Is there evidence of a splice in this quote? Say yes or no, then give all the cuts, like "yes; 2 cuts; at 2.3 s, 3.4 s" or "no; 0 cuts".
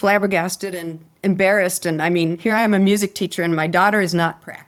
no; 0 cuts